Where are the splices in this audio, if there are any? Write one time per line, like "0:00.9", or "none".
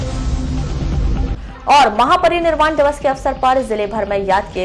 0:01.0